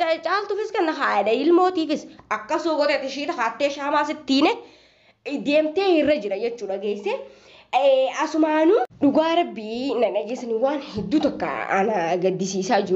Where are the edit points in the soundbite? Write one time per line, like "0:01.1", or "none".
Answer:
0:08.9